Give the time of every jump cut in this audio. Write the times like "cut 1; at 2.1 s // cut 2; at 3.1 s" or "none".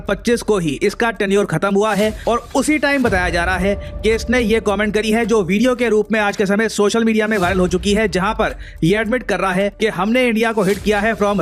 none